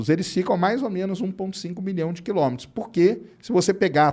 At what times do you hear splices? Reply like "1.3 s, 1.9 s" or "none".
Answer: none